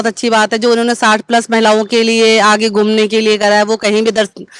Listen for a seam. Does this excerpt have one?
no; 0 cuts

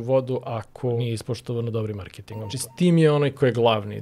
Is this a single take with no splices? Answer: no; 2 cuts; at 1.0 s, 2.6 s

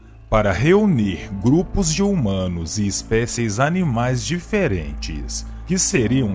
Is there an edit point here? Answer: yes; 1 cut; at 4.0 s

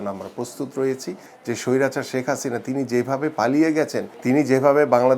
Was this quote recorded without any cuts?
no; 2 cuts; at 1.3 s, 4.1 s

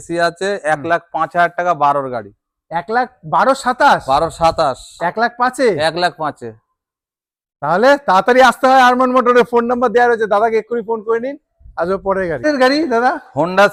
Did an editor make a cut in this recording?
no; 0 cuts

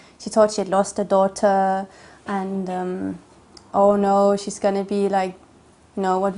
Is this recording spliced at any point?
no; 0 cuts

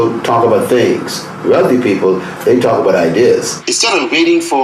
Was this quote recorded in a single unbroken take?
no; 1 cut; at 3.6 s

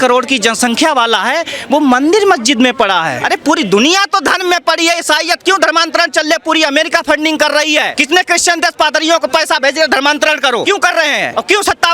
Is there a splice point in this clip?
yes; 3 cuts; at 3.2 s, 7.9 s, 10.8 s

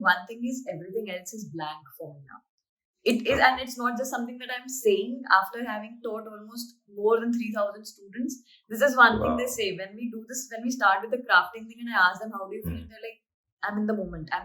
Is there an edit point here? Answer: no; 0 cuts

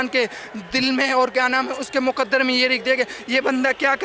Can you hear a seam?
yes; 1 cut; at 2.3 s

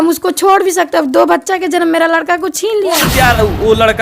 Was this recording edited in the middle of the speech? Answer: yes; 1 cut; at 3.1 s

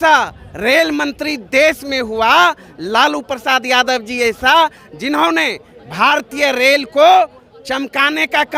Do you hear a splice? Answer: no; 0 cuts

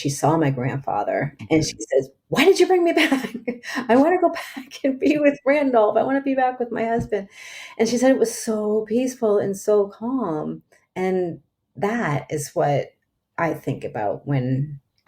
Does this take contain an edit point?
yes; 1 cut; at 1.3 s

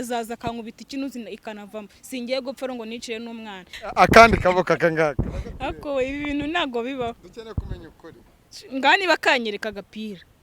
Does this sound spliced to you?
yes; 1 cut; at 3.7 s

